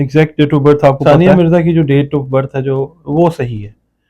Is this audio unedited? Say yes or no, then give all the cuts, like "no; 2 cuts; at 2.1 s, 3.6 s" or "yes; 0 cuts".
no; 1 cut; at 1.0 s